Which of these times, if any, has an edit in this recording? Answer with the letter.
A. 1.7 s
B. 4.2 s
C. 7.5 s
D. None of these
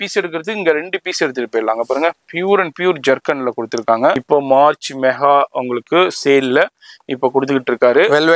B